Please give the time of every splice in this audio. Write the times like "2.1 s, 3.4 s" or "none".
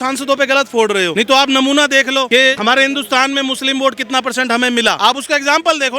1.1 s, 2.4 s, 5.0 s